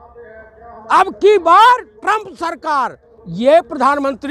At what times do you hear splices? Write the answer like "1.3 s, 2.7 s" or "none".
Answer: 3.0 s

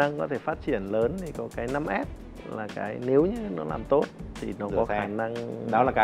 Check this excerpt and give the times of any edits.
none

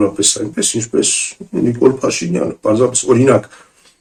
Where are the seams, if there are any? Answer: none

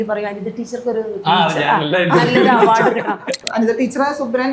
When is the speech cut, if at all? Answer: 3.4 s

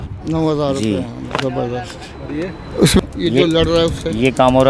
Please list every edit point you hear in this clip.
3.0 s

